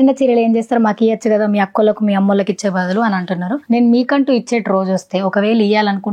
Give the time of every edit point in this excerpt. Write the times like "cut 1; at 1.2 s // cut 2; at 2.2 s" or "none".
cut 1; at 3.6 s